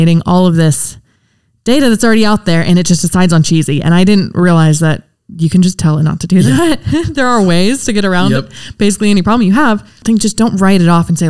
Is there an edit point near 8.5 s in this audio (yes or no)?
no